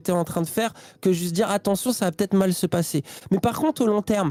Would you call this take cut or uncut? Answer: uncut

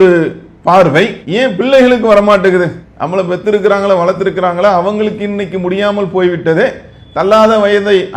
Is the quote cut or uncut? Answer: uncut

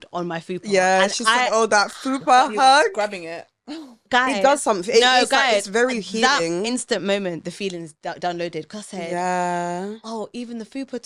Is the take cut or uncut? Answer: uncut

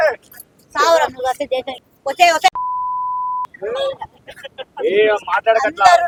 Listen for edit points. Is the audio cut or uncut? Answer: uncut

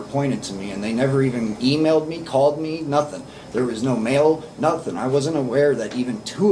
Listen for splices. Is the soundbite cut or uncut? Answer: uncut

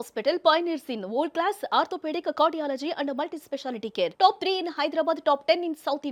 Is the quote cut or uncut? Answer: uncut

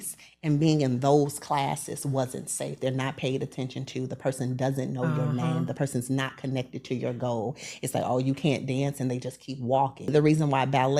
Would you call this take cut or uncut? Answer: cut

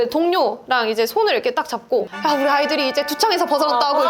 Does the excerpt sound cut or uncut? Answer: cut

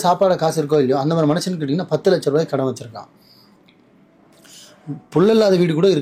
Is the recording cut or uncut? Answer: uncut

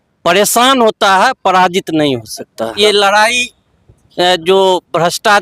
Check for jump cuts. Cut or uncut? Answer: cut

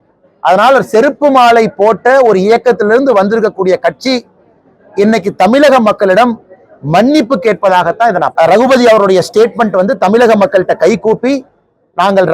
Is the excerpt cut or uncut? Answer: cut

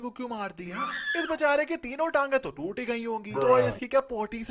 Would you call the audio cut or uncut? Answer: uncut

